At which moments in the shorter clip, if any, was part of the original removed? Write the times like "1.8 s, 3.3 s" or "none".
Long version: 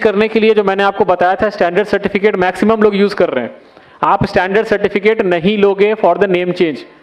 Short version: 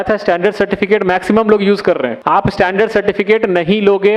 2.1 s